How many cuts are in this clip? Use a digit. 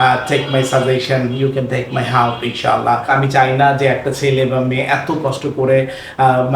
1